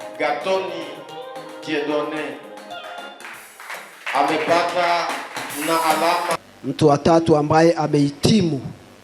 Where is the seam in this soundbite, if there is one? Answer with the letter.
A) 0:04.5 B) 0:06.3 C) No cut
B